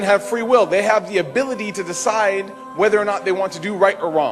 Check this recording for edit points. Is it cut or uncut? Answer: uncut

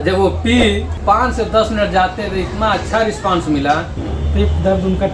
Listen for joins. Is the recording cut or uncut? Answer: cut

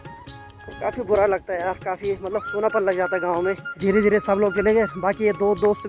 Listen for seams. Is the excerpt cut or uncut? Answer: cut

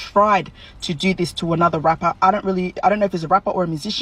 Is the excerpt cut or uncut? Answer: uncut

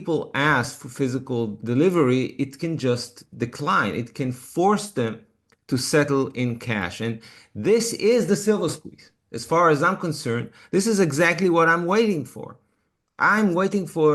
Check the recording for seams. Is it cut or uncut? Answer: cut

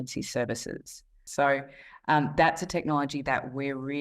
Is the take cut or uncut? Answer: cut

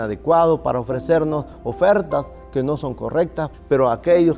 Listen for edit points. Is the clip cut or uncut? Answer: cut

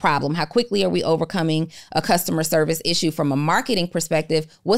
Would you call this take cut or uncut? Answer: uncut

